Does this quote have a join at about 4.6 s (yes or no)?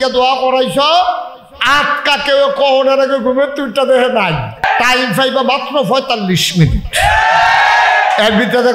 yes